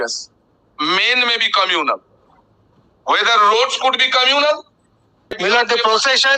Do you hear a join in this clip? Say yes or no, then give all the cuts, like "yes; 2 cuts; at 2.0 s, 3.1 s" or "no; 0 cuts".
yes; 1 cut; at 5.4 s